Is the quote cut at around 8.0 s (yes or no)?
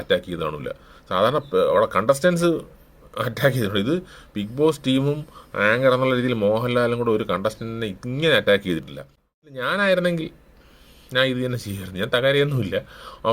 no